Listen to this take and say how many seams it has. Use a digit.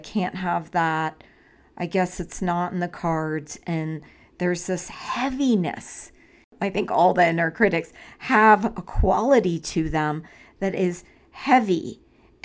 1